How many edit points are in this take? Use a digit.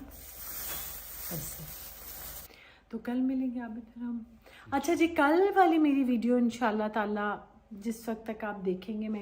1